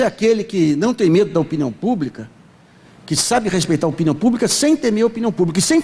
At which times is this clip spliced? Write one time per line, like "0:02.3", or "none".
none